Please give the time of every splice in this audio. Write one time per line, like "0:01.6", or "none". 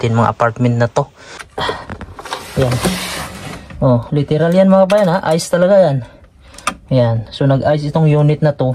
0:01.2

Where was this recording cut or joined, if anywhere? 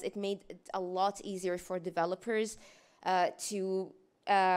none

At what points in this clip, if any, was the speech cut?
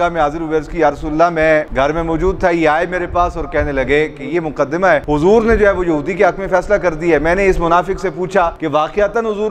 none

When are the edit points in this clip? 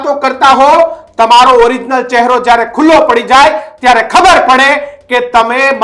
none

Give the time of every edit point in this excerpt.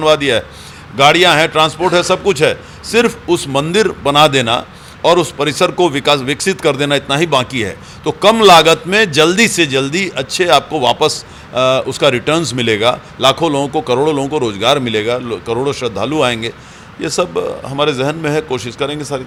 none

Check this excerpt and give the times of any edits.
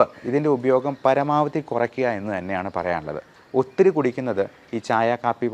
0:03.3

